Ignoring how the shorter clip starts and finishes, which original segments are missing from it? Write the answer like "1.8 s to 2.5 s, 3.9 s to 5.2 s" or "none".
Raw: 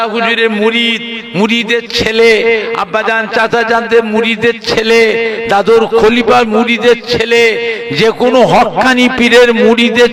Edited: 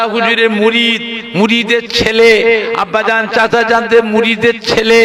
none